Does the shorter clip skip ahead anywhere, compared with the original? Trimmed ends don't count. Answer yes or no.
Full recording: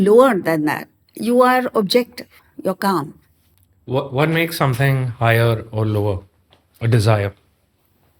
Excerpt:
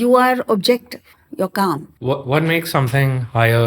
yes